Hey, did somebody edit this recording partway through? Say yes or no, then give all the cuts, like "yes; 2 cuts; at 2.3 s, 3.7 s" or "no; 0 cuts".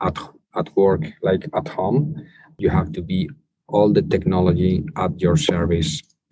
yes; 1 cut; at 2.5 s